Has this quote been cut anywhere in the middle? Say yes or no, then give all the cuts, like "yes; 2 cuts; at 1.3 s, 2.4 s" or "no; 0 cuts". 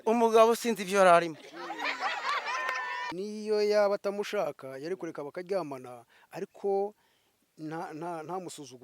yes; 1 cut; at 3.1 s